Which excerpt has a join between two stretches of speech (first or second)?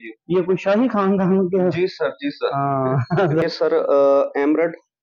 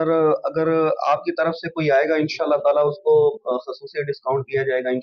first